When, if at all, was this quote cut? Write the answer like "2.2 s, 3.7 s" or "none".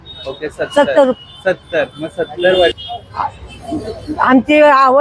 2.7 s